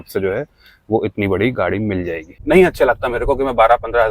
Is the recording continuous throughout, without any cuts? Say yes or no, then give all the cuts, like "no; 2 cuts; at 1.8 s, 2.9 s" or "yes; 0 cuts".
no; 1 cut; at 2.2 s